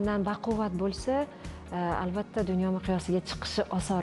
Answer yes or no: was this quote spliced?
no